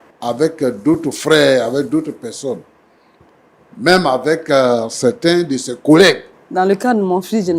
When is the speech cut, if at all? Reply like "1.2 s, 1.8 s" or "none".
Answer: 6.3 s